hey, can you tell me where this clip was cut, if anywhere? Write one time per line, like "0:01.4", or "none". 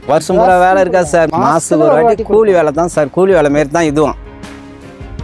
0:01.3
0:04.1